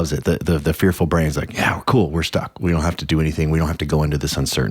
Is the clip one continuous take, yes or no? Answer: yes